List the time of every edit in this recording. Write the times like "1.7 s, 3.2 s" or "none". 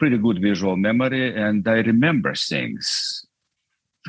none